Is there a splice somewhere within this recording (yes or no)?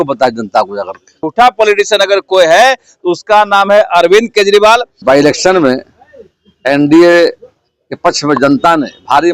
yes